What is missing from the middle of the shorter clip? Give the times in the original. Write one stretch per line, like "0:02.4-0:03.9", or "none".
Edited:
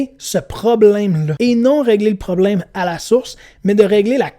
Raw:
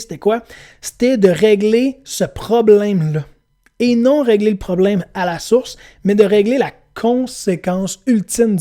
0:03.1-0:03.7